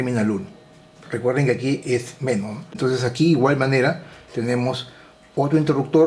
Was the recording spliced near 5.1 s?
no; 1 cut; at 2.8 s

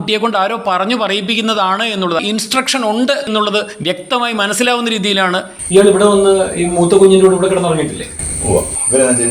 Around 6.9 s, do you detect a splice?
no; 2 cuts; at 2.2 s, 5.5 s

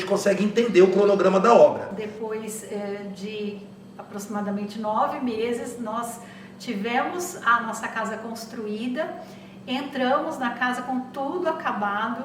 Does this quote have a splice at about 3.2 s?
no; 1 cut; at 2.0 s

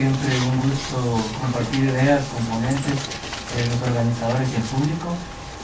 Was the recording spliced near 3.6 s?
no; 0 cuts

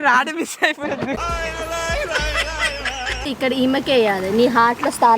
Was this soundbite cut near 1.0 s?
yes; 2 cuts; at 1.0 s, 3.2 s

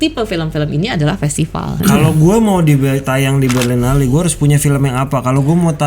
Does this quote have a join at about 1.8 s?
yes; 1 cut; at 1.8 s

